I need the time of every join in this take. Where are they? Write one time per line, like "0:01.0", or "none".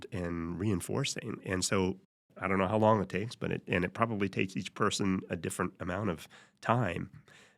0:02.2